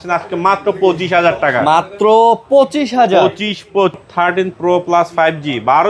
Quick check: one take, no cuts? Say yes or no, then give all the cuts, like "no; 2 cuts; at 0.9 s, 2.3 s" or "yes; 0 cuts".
no; 1 cut; at 4.0 s